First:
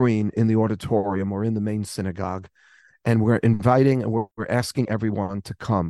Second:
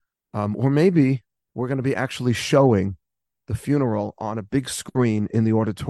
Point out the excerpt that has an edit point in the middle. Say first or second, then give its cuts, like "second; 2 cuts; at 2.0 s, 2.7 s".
first; 1 cut; at 4.4 s